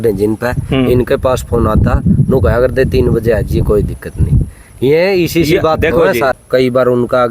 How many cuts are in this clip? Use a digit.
1